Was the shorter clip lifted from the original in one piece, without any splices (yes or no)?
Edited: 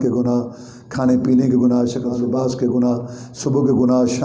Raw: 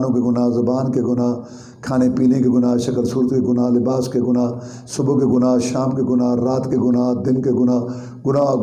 no